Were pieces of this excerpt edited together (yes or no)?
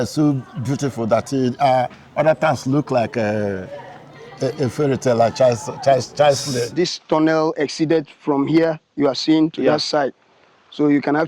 yes